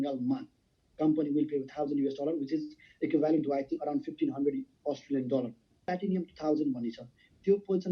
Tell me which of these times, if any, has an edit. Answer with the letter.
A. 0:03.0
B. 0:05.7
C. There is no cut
B